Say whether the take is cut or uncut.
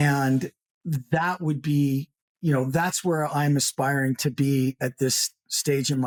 uncut